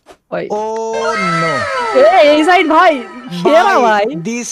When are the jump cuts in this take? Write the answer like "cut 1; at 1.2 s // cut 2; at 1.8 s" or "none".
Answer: none

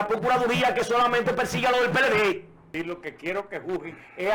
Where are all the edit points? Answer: cut 1; at 2.7 s

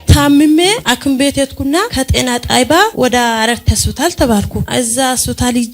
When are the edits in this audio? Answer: cut 1; at 0.8 s // cut 2; at 1.9 s // cut 3; at 2.9 s // cut 4; at 4.6 s

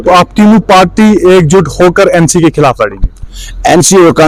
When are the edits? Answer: none

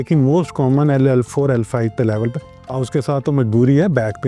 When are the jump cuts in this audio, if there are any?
cut 1; at 2.7 s

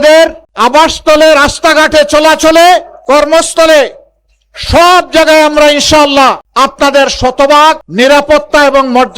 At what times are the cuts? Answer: cut 1; at 6.4 s // cut 2; at 7.9 s

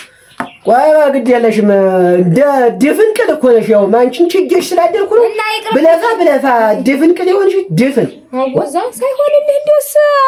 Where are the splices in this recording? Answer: none

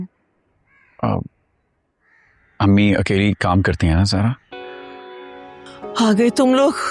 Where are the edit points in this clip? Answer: cut 1; at 5.8 s

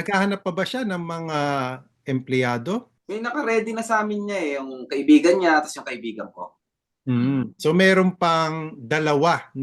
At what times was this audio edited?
cut 1; at 3.0 s

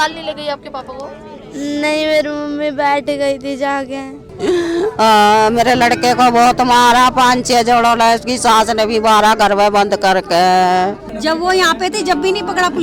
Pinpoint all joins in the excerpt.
cut 1; at 4.3 s // cut 2; at 11.1 s

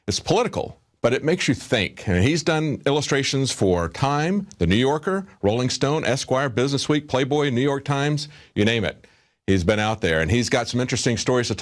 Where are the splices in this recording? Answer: cut 1; at 8.9 s

